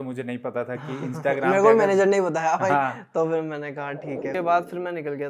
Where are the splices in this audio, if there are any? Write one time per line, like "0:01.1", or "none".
0:04.3